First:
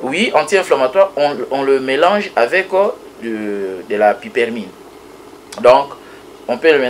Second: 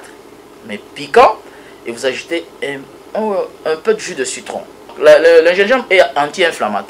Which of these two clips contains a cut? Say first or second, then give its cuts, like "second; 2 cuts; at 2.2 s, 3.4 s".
second; 1 cut; at 4.9 s